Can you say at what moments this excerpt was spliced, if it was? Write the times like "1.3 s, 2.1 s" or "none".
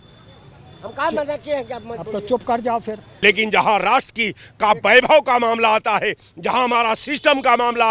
3.0 s